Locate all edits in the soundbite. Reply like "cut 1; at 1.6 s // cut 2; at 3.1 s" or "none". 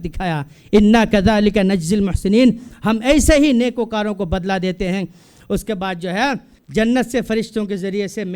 cut 1; at 6.5 s